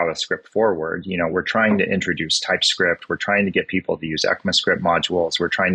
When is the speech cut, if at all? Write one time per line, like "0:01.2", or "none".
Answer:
none